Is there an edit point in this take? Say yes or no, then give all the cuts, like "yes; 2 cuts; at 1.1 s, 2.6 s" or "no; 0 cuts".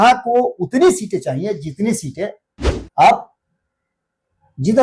no; 0 cuts